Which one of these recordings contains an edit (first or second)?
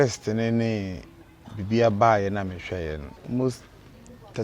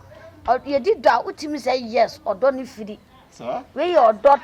first